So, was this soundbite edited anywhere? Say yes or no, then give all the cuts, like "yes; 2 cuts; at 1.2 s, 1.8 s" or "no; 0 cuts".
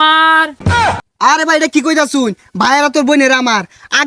yes; 1 cut; at 0.9 s